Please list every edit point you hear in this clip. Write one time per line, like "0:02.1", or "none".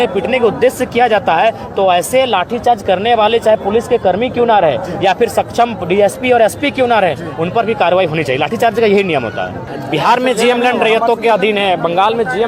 0:09.6